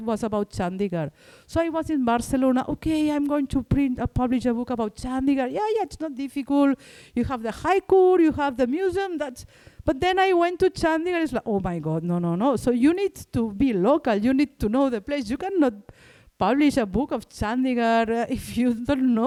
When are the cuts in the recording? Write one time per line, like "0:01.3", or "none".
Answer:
none